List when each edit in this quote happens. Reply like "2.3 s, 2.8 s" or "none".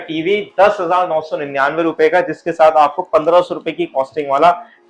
none

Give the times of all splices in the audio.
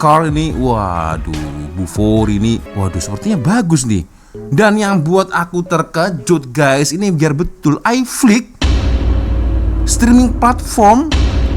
2.7 s

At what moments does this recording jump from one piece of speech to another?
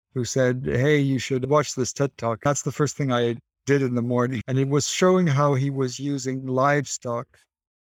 2.4 s, 4.4 s

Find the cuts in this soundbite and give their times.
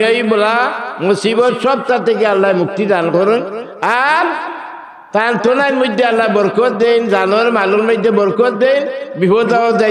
none

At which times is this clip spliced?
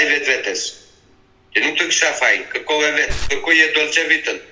3.2 s

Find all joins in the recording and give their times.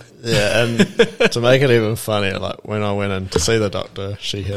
none

